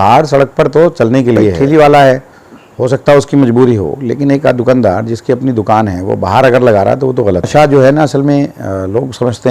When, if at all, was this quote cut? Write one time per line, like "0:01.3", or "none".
0:01.6
0:07.5